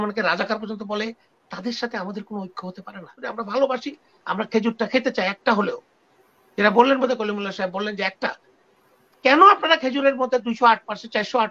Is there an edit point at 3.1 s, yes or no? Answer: yes